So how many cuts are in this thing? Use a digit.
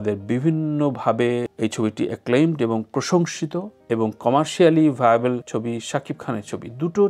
0